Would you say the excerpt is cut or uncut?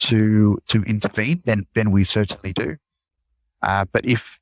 uncut